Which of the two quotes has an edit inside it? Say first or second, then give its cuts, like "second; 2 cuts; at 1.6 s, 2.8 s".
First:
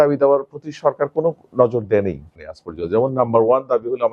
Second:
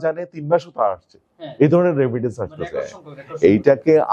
first; 1 cut; at 2.4 s